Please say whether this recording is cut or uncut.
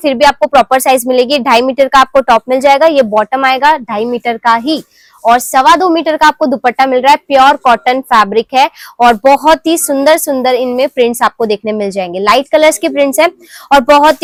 uncut